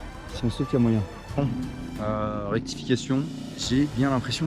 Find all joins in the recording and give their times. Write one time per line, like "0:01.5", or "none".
0:01.4
0:03.5